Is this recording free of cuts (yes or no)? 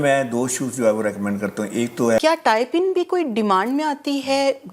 no